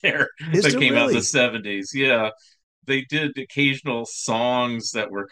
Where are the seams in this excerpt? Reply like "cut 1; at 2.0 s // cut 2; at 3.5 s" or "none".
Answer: none